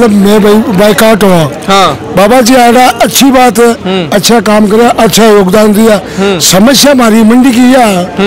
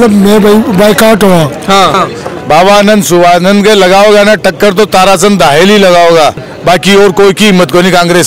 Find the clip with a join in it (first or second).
second